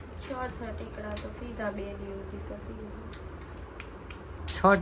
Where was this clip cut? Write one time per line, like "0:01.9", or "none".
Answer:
none